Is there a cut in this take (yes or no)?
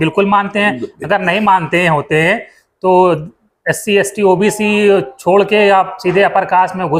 no